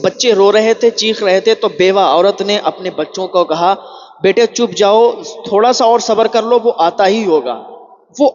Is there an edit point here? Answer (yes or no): no